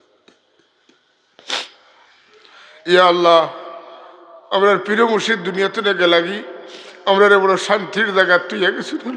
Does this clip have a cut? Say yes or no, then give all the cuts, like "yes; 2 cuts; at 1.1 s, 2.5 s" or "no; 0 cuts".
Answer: no; 0 cuts